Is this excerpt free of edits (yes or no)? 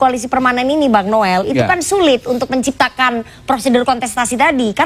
yes